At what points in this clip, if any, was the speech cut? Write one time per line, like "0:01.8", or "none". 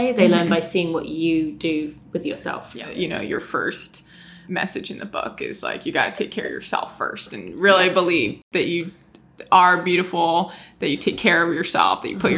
0:02.9
0:04.4
0:08.4